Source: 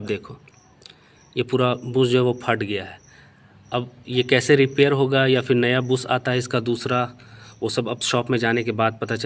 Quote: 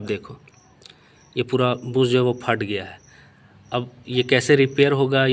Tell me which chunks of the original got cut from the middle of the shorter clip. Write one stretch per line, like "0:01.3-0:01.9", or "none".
none